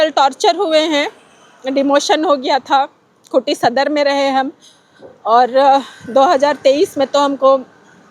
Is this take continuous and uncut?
yes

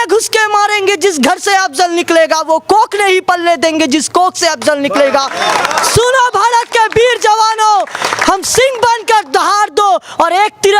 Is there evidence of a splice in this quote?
no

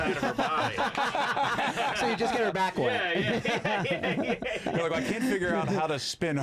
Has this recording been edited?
no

